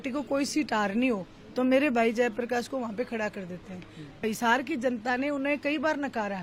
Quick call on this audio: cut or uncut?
cut